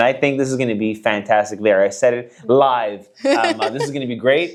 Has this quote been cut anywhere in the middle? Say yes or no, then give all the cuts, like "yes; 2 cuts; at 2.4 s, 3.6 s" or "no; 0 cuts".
no; 0 cuts